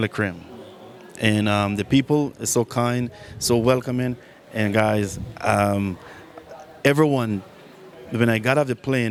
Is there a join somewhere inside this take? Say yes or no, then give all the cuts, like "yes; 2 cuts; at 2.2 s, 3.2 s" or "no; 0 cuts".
no; 0 cuts